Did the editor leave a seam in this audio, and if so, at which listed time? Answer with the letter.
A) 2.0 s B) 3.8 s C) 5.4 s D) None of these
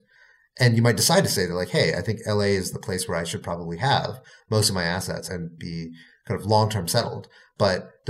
C